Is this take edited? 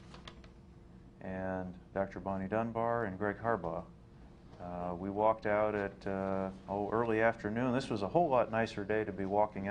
yes; 1 cut; at 5.0 s

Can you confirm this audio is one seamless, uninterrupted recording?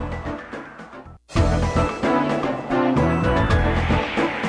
no; 2 cuts; at 1.2 s, 2.7 s

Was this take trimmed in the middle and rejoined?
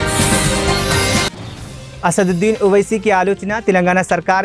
yes; 1 cut; at 1.2 s

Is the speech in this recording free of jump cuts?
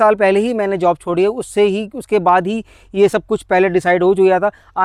yes; 0 cuts

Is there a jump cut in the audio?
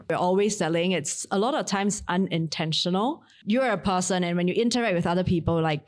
yes; 1 cut; at 3.3 s

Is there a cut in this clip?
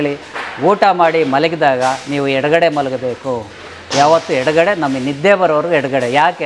no; 0 cuts

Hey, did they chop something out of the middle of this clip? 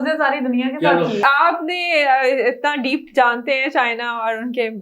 yes; 1 cut; at 1.2 s

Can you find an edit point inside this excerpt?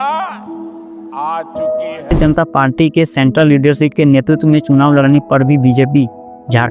yes; 1 cut; at 2.1 s

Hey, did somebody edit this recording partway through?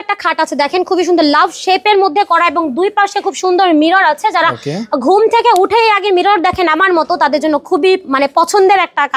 no; 0 cuts

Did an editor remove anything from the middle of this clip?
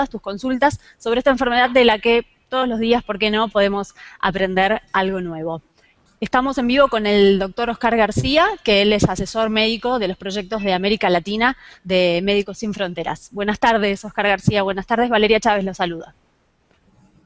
yes; 1 cut; at 11.4 s

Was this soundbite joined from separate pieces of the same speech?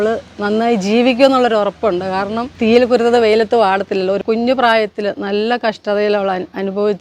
yes; 2 cuts; at 2.5 s, 4.2 s

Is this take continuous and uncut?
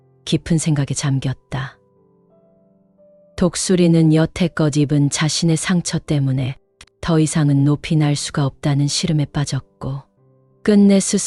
yes; 0 cuts

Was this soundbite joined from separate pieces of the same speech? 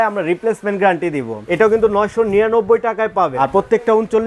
yes; 2 cuts; at 1.4 s, 3.4 s

